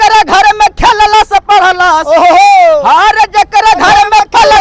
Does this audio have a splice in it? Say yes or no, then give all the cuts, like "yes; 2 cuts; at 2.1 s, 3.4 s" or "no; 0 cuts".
no; 0 cuts